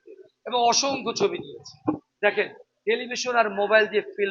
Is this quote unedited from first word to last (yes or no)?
no